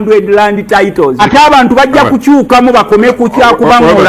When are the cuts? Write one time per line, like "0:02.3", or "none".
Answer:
0:01.2